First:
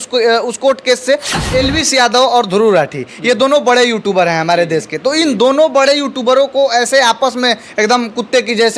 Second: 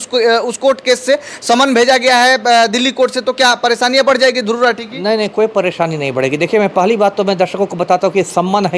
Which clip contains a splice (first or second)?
first